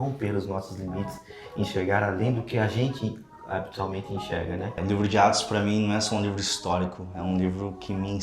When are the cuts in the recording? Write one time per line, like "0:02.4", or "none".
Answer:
0:04.8